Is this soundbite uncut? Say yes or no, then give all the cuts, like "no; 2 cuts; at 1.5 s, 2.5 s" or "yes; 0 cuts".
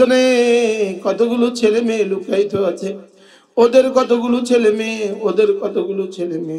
yes; 0 cuts